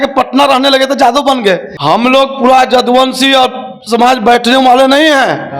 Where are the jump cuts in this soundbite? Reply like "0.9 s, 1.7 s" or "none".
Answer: 1.7 s